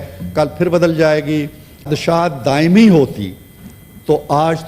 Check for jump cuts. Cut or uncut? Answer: cut